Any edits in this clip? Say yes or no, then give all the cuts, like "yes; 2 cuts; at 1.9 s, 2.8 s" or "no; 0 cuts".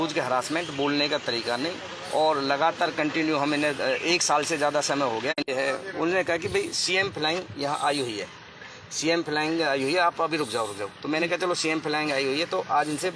no; 0 cuts